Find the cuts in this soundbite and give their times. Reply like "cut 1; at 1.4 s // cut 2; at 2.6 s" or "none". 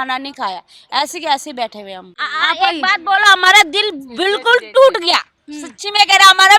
none